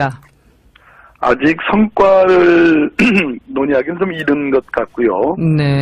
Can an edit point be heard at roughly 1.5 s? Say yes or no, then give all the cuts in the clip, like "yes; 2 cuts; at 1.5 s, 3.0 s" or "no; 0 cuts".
no; 1 cut; at 2.9 s